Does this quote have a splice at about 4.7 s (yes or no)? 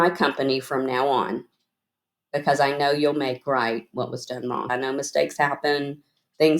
yes